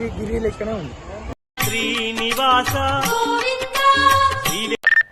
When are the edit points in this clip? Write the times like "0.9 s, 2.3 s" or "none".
1.3 s

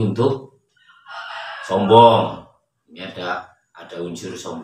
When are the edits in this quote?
none

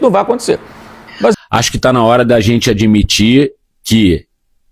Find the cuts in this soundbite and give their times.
1.3 s

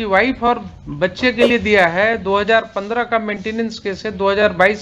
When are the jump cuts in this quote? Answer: none

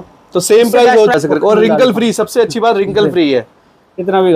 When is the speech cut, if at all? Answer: 1.1 s

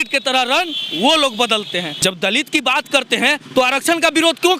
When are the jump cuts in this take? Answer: 1.9 s

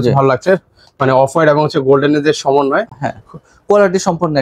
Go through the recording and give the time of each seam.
none

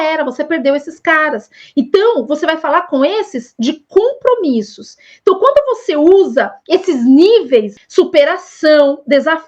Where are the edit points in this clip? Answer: 7.7 s

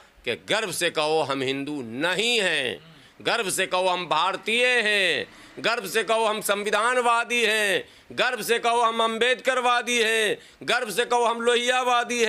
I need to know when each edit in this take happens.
none

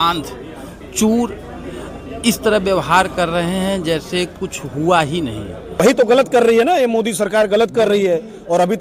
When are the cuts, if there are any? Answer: 3.1 s, 5.8 s

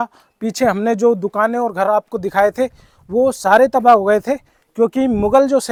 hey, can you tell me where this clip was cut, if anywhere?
none

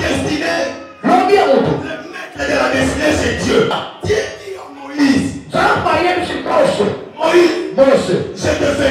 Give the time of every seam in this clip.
3.7 s

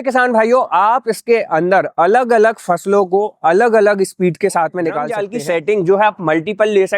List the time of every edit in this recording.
5.2 s

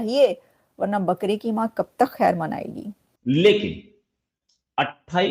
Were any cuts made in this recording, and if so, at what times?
3.1 s

